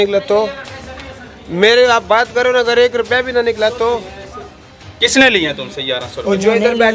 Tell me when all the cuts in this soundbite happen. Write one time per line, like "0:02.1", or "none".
none